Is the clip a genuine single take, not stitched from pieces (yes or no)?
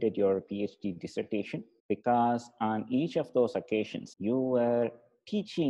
no